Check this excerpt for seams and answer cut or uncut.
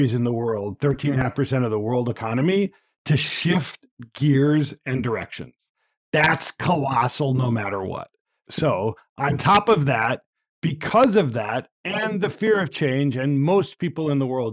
uncut